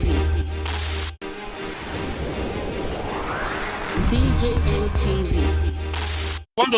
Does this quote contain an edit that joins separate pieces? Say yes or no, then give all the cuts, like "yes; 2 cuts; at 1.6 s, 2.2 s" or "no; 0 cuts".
yes; 1 cut; at 1.2 s